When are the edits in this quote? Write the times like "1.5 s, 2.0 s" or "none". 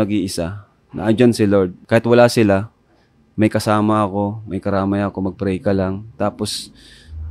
1.8 s

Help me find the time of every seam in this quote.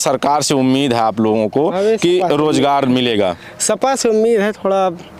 none

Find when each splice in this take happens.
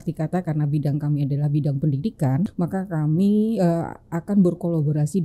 2.5 s

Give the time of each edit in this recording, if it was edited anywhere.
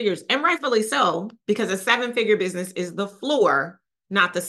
1.3 s

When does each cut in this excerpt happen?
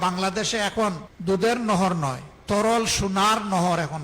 1.1 s

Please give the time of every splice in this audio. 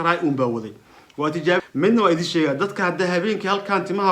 1.6 s

